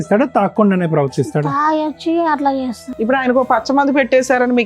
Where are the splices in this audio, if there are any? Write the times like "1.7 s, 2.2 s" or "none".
2.8 s